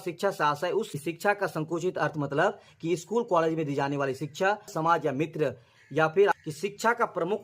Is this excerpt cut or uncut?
cut